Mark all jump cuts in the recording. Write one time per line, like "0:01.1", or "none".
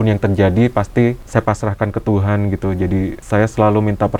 0:01.2
0:03.2

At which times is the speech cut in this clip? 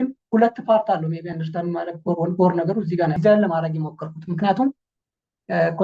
0:03.2

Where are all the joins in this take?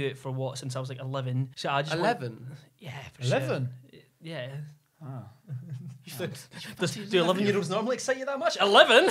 0:01.5

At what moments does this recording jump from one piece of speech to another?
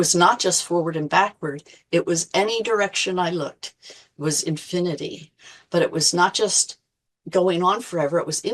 none

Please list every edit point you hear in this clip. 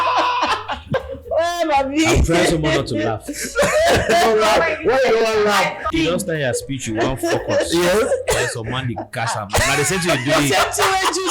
0:00.9
0:05.9

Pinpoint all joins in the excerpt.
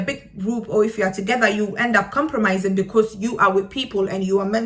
none

